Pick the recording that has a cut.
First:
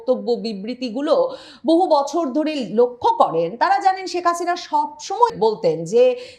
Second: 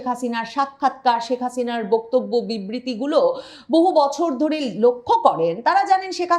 first; 1 cut; at 5.3 s

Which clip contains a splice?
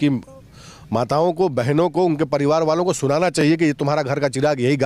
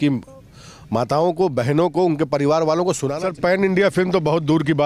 second; 1 cut; at 3.1 s

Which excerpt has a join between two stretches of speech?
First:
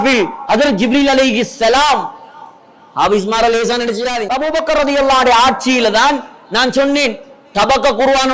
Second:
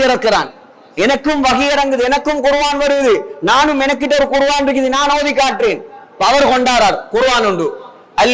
first; 1 cut; at 4.2 s

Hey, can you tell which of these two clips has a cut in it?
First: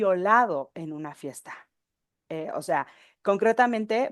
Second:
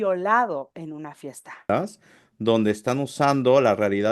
second; 1 cut; at 1.7 s

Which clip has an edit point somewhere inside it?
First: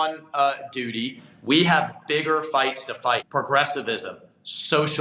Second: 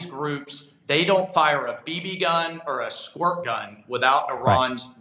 first; 2 cuts; at 1.2 s, 3.2 s

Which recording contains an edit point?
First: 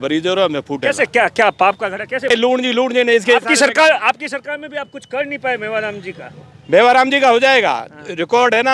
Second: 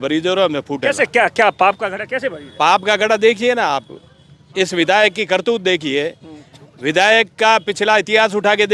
first; 1 cut; at 2.3 s

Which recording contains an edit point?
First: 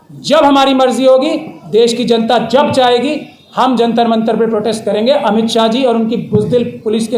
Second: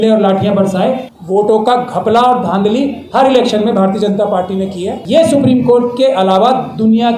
second; 2 cuts; at 1.1 s, 4.9 s

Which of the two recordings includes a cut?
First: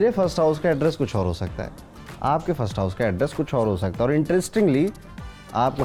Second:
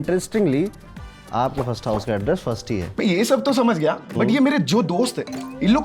second; 1 cut; at 2.9 s

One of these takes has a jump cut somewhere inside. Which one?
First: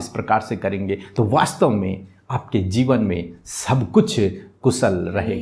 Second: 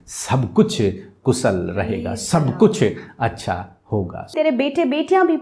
second; 1 cut; at 4.3 s

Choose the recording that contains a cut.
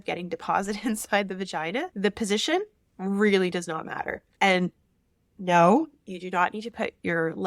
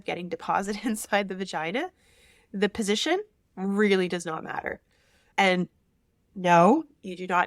first; 2 cuts; at 1.9 s, 4.2 s

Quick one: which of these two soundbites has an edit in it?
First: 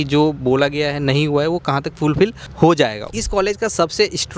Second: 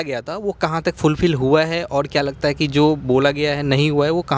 first; 1 cut; at 3.0 s

